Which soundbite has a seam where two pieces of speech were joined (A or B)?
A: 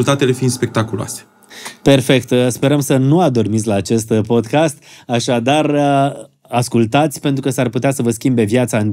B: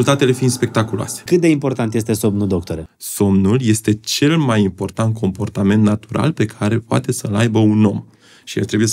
B